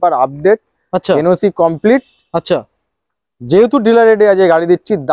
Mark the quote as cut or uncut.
uncut